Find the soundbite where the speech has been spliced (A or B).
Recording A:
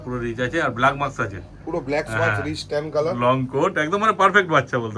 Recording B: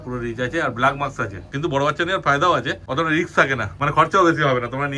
B